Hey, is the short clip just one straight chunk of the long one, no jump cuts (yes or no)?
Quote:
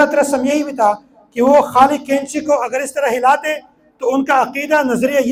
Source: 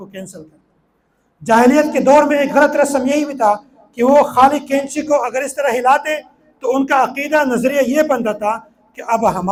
yes